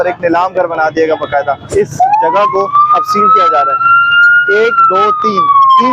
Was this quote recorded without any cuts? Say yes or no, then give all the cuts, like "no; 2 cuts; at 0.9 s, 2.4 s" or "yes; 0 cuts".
no; 1 cut; at 1.6 s